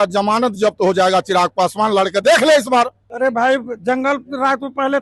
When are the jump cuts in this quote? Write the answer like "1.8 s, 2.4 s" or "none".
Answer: 3.0 s